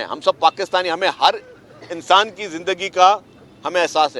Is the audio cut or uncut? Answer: uncut